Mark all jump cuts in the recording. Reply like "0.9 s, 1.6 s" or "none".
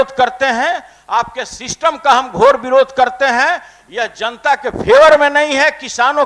none